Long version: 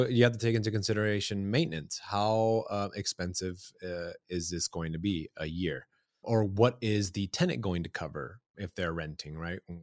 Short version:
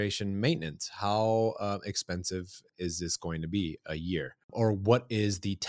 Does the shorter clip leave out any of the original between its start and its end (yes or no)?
yes